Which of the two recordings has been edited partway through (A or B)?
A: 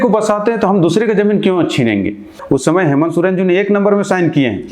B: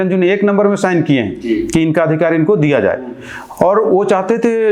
A